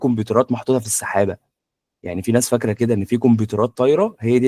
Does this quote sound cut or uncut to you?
uncut